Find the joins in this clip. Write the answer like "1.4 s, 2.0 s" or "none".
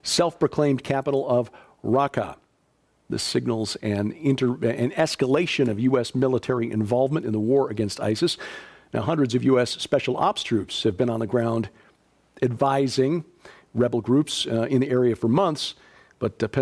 none